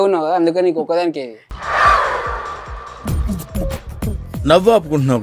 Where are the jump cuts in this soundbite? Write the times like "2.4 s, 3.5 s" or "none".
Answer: none